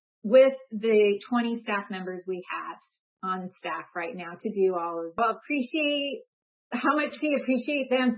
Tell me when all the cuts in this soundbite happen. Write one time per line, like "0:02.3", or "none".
0:05.2